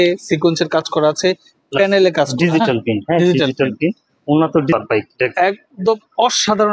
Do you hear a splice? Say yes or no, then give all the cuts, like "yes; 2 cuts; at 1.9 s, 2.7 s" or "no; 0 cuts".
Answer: yes; 1 cut; at 4.7 s